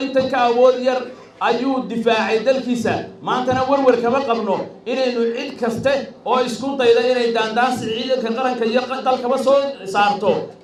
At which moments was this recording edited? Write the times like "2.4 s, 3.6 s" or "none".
none